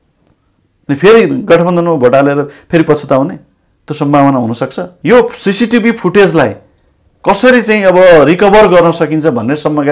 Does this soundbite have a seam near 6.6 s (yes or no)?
no